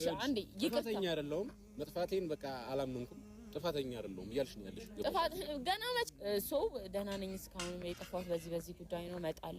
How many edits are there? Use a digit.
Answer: 1